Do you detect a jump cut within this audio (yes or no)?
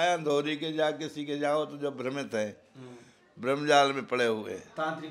no